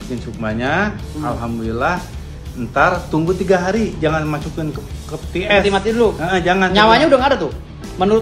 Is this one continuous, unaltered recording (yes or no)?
yes